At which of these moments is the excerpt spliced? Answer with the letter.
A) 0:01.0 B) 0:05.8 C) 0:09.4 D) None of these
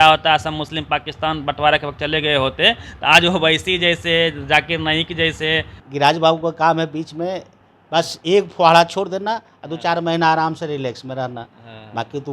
B